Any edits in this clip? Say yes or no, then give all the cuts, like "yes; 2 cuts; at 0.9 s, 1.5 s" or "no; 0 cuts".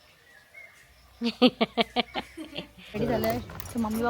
yes; 1 cut; at 3.0 s